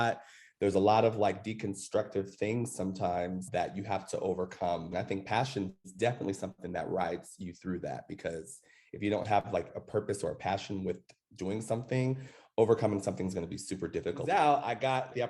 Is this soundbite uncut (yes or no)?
no